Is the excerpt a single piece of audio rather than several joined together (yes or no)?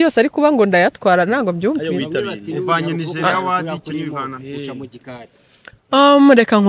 yes